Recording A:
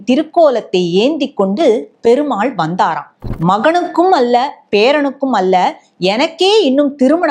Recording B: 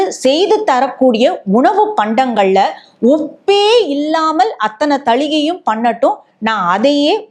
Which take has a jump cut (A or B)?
A